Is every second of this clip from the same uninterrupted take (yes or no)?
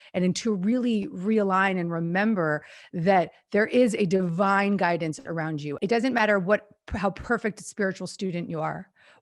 no